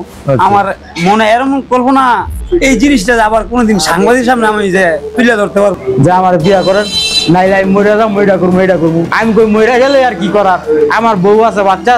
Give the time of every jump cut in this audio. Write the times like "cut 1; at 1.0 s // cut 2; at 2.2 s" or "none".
cut 1; at 2.3 s // cut 2; at 5.7 s